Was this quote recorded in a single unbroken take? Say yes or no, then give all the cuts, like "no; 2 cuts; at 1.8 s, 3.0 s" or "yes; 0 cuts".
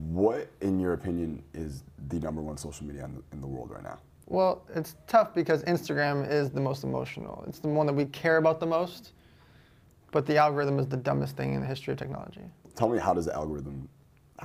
no; 2 cuts; at 4.1 s, 12.7 s